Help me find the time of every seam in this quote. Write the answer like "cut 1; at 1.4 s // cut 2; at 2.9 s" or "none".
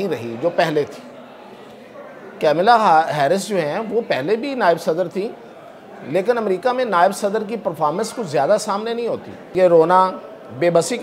cut 1; at 9.4 s